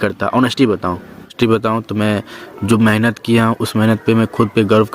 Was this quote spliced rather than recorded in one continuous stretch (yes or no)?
yes